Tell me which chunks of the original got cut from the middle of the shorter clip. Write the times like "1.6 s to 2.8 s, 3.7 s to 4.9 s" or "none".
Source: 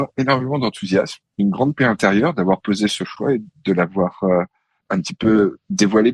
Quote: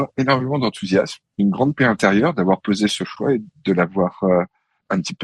none